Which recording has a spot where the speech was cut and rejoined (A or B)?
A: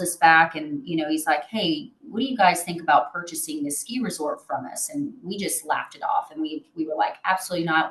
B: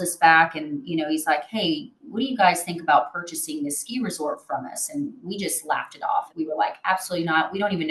B